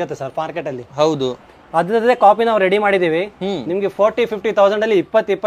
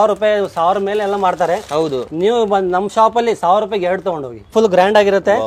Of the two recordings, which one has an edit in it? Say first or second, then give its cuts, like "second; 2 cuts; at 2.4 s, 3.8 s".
second; 1 cut; at 4.5 s